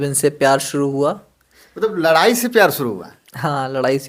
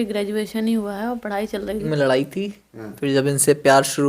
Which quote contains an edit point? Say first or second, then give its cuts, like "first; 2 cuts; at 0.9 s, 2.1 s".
second; 1 cut; at 1.8 s